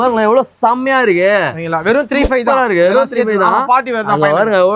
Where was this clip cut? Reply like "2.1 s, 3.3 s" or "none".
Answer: none